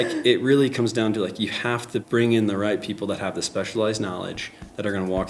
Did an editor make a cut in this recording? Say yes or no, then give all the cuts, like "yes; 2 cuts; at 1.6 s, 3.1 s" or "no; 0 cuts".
yes; 1 cut; at 2.0 s